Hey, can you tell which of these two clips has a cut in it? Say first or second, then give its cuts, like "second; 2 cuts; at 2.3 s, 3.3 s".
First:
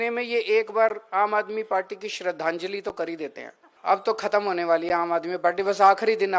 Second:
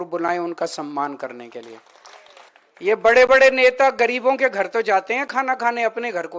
first; 1 cut; at 3.7 s